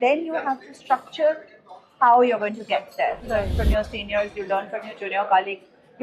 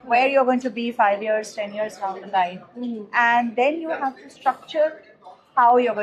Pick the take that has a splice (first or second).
first